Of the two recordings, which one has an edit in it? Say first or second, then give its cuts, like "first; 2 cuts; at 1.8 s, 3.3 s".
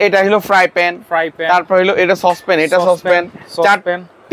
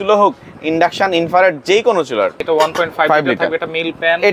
second; 1 cut; at 2.4 s